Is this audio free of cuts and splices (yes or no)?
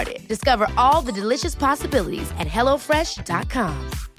yes